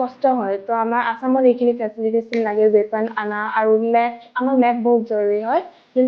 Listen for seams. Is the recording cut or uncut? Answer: uncut